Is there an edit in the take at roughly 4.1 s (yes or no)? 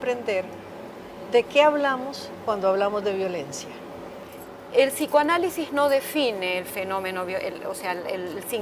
yes